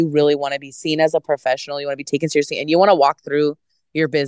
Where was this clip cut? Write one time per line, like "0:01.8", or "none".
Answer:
none